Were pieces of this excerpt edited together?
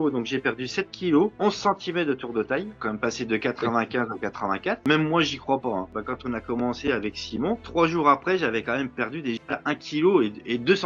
yes; 2 cuts; at 4.8 s, 5.9 s

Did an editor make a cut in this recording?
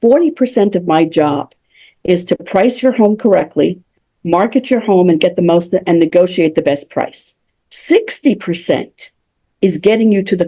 no; 0 cuts

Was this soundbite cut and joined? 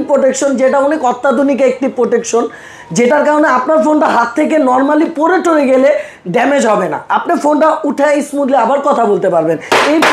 no; 0 cuts

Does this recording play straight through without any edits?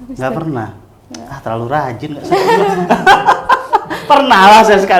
yes; 0 cuts

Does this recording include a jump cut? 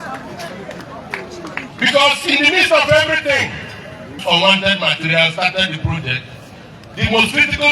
yes; 1 cut; at 4.2 s

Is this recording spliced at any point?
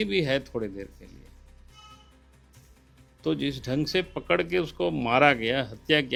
no; 0 cuts

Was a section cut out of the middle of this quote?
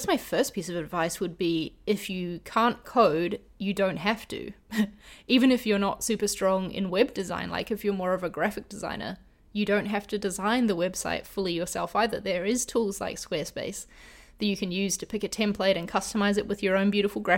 no; 0 cuts

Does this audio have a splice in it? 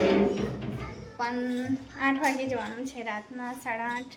no; 0 cuts

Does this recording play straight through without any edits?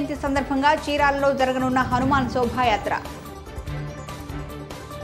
yes; 0 cuts

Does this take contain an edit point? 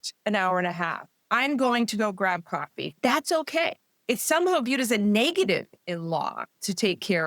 yes; 2 cuts; at 2.8 s, 3.9 s

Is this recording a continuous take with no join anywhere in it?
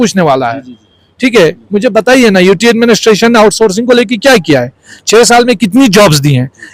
yes; 0 cuts

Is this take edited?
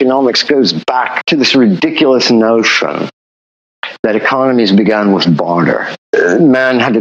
yes; 2 cuts; at 1.2 s, 6.1 s

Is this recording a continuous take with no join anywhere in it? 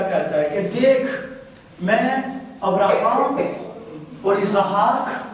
yes; 0 cuts

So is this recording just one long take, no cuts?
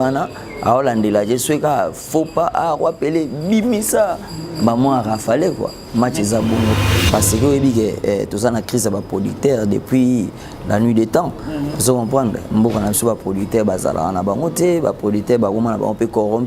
no; 1 cut; at 6.9 s

